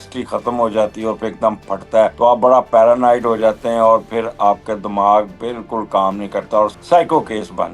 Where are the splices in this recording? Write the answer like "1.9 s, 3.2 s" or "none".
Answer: 2.1 s, 6.8 s